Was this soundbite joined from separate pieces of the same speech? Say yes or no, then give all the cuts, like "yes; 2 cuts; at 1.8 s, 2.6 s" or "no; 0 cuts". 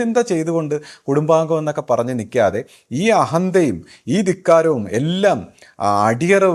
no; 0 cuts